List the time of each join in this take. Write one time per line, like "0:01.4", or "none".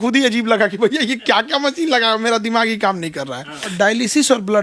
0:03.7